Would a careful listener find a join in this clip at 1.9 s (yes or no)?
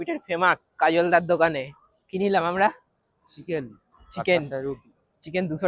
no